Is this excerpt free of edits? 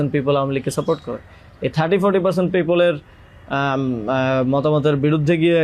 yes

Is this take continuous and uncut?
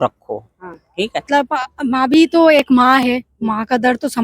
no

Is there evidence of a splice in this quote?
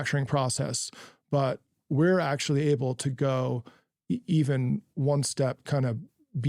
no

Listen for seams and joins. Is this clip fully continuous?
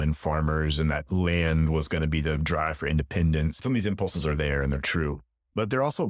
no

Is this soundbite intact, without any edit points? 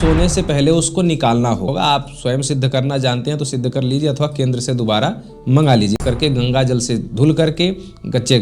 no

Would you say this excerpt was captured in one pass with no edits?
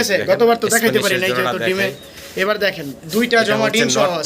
yes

